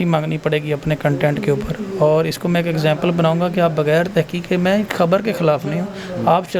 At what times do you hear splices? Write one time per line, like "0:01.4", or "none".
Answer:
none